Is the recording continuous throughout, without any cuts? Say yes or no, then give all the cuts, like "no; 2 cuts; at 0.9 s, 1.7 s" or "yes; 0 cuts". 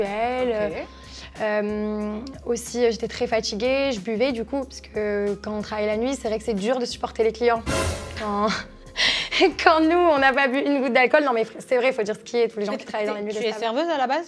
yes; 0 cuts